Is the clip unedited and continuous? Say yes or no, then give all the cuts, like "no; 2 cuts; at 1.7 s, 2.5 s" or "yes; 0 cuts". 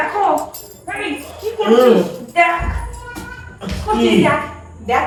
yes; 0 cuts